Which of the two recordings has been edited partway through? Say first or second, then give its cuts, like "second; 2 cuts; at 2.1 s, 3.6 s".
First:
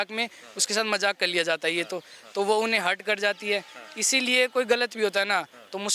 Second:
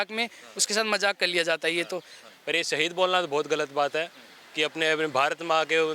second; 1 cut; at 2.2 s